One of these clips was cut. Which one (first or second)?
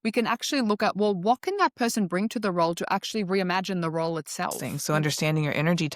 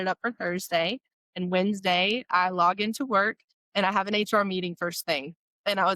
first